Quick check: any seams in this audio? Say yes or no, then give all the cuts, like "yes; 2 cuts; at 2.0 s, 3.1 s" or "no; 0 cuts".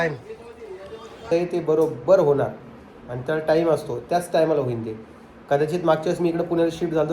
yes; 1 cut; at 1.3 s